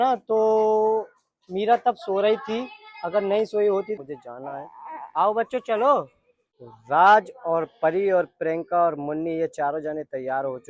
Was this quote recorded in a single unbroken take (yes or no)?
no